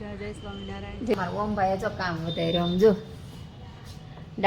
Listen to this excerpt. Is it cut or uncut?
cut